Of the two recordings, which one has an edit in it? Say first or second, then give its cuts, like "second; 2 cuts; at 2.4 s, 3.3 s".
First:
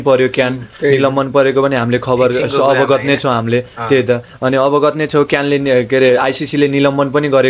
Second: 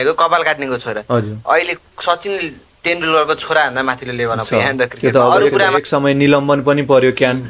second; 1 cut; at 5.8 s